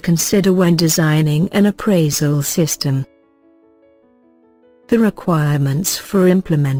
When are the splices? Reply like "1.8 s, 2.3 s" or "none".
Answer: none